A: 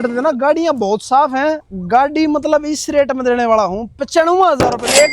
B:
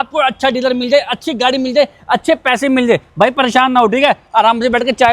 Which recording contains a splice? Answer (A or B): A